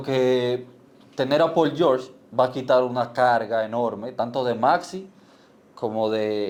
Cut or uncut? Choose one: uncut